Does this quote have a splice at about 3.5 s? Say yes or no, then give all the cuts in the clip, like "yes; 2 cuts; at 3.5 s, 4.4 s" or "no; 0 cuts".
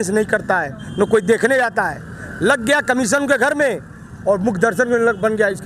no; 0 cuts